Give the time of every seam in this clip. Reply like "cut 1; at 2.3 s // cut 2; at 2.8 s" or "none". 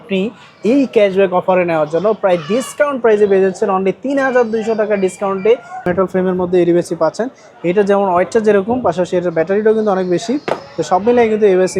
cut 1; at 5.9 s